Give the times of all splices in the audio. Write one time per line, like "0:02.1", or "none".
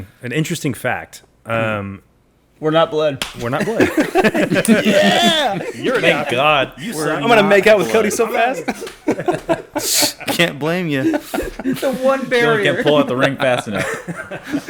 none